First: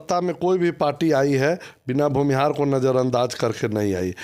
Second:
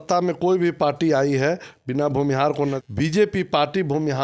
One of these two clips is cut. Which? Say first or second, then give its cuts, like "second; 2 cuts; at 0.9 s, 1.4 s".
second; 1 cut; at 2.8 s